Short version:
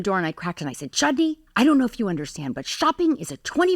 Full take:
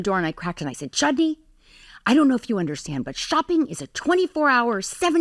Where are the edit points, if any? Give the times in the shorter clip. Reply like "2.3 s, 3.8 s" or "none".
1.4 s